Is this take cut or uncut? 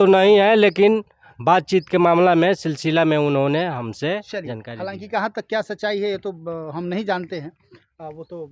uncut